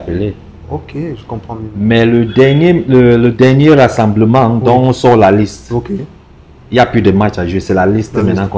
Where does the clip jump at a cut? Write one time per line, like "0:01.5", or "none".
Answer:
none

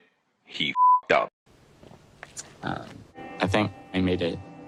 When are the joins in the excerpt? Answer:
none

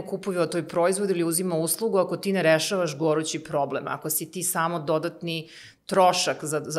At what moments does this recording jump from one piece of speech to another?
none

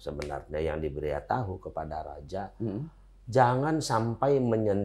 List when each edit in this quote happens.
none

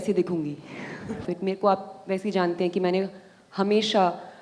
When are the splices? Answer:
0:01.3

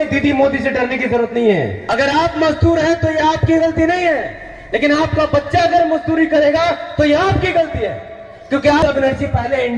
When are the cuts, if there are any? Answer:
0:01.8
0:08.8

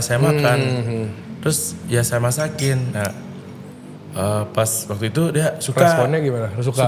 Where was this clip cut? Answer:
none

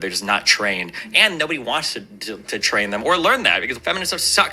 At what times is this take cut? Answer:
none

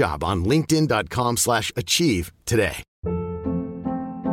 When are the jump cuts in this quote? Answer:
0:02.9

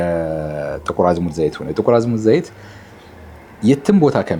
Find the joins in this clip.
none

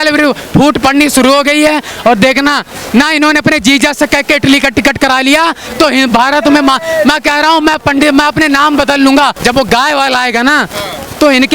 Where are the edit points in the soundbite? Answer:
0:09.4

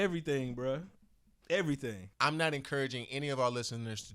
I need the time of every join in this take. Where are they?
0:02.1

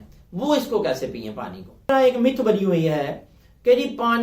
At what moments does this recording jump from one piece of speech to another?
0:01.9

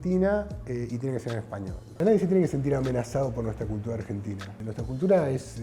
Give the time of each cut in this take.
0:02.0
0:04.6

